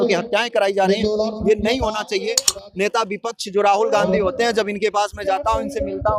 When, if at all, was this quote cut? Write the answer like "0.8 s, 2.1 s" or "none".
2.5 s